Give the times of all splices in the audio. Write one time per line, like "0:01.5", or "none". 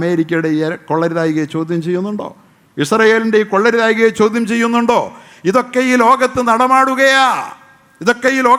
none